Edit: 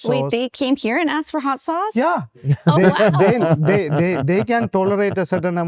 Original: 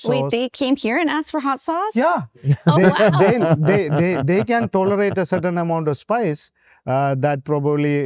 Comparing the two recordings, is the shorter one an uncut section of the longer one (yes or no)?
yes